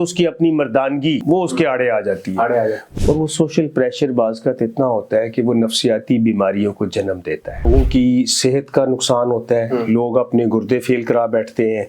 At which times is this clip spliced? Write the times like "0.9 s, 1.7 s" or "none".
1.2 s, 2.8 s, 7.7 s